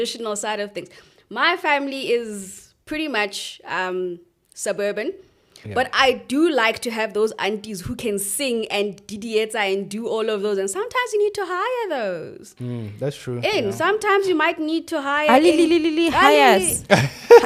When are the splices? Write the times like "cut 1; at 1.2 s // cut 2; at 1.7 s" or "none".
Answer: none